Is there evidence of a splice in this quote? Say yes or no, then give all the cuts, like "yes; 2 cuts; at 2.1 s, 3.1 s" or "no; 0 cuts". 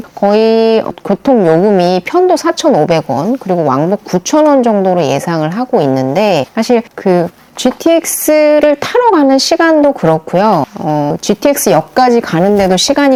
no; 0 cuts